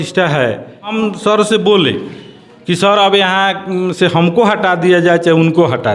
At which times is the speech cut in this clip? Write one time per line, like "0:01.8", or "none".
0:00.9